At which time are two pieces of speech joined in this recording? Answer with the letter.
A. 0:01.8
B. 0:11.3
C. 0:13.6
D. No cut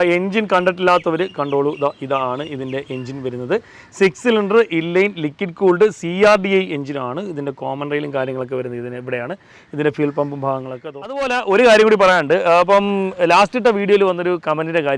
B